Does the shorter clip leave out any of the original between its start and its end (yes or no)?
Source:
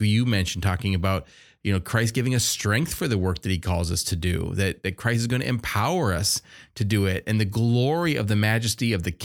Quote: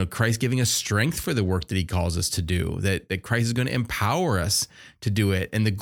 no